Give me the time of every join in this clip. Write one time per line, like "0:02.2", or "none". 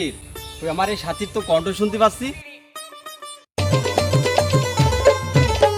none

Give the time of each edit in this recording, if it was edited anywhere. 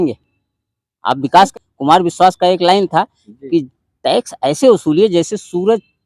0:01.5

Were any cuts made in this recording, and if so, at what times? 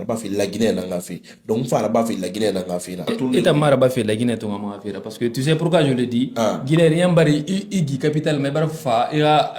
0:03.1

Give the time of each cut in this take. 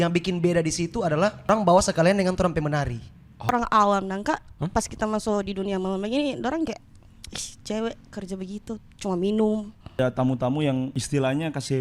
0:01.5
0:03.5
0:04.6
0:10.0
0:11.0

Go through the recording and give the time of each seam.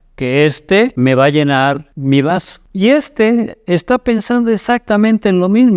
0:00.9
0:01.9
0:02.6

